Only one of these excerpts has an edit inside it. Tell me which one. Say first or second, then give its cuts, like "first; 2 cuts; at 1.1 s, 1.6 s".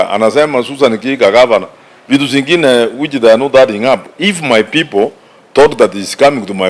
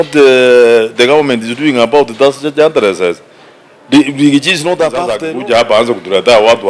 second; 1 cut; at 5.2 s